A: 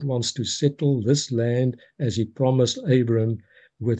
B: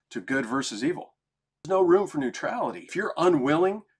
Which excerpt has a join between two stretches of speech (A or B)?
B